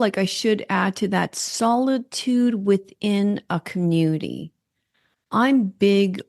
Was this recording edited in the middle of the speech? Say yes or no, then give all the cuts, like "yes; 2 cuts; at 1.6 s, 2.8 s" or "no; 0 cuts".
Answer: no; 0 cuts